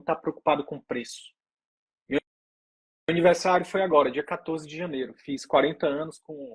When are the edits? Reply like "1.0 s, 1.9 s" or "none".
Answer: none